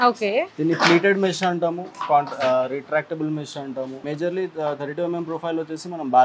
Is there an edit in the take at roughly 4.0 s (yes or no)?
yes